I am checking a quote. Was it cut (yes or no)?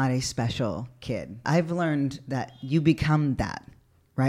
yes